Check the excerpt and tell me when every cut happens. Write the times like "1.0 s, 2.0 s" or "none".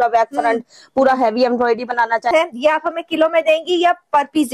2.3 s